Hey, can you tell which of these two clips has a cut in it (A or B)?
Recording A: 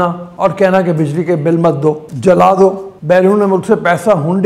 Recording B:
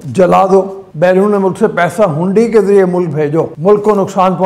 B